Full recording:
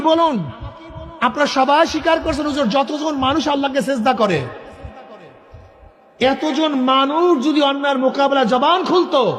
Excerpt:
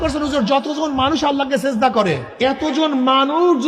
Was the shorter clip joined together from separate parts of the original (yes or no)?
yes